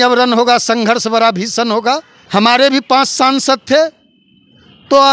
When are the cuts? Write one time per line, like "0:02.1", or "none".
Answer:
0:02.1